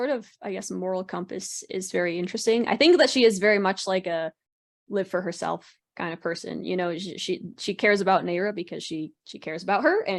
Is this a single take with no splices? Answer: yes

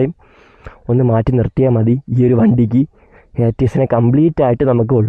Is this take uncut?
yes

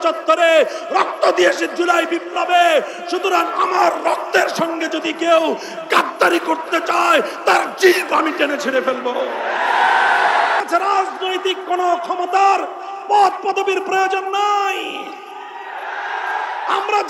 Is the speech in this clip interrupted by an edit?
yes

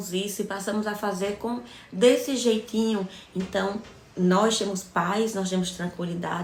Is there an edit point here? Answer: no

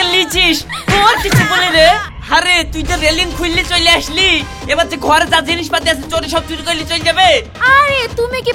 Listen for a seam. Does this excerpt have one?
yes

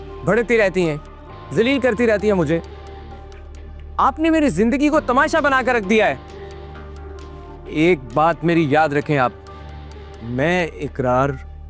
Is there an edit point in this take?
no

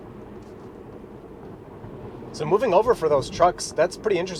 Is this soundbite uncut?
yes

